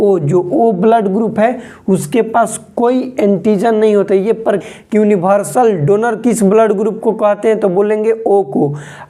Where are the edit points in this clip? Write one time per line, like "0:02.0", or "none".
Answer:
0:04.6